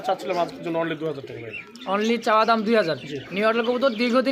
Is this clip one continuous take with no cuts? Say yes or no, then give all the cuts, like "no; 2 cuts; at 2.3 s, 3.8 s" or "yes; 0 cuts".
yes; 0 cuts